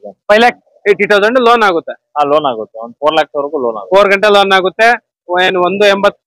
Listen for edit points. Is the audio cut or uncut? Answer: uncut